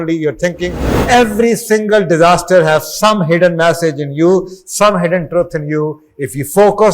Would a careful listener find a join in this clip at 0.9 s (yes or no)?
yes